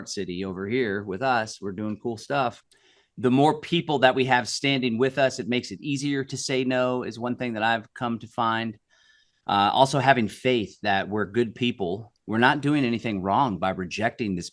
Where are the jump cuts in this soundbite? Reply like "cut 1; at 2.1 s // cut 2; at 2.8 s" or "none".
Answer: cut 1; at 2.7 s